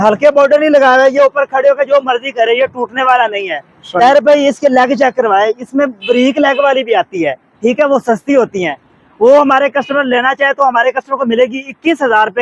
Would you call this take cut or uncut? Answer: uncut